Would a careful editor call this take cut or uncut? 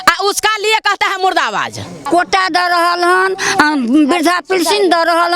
cut